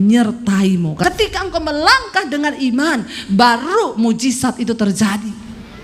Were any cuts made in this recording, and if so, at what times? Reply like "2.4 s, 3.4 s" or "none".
1.0 s